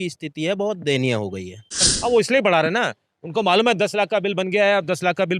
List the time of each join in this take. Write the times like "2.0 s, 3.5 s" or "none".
1.9 s